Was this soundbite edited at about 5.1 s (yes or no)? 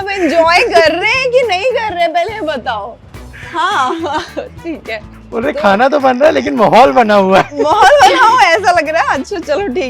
yes